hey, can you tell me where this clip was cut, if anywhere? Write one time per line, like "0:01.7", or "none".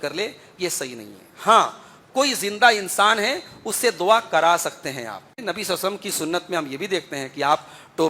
0:05.4